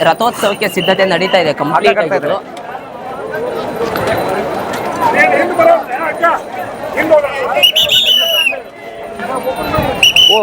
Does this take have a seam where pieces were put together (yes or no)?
no